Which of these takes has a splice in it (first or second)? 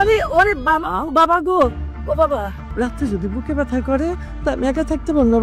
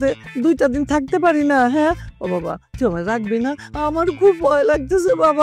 first